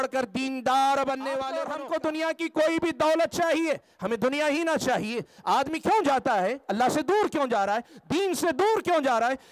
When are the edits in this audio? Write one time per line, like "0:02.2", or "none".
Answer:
0:01.5